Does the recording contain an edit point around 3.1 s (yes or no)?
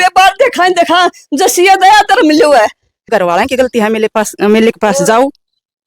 yes